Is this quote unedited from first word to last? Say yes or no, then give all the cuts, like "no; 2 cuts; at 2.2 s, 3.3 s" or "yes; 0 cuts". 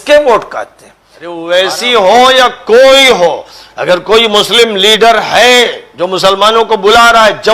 no; 1 cut; at 1.5 s